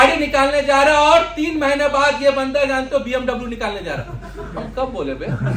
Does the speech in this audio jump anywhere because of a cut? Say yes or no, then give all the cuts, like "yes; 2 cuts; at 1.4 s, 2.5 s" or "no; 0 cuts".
no; 0 cuts